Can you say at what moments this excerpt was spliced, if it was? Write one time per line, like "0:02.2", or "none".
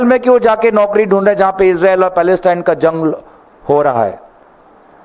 none